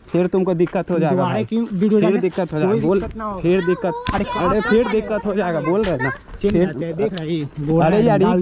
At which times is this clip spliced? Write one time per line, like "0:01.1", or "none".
none